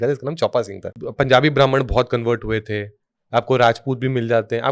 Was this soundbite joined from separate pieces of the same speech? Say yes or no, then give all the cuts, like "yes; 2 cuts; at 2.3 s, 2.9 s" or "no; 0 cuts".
yes; 1 cut; at 1.0 s